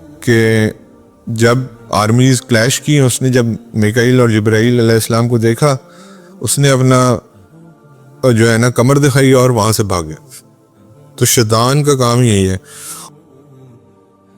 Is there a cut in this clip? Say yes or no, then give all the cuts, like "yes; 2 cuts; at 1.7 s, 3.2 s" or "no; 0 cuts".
yes; 1 cut; at 13.1 s